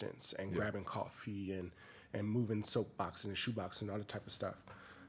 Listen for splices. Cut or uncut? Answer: uncut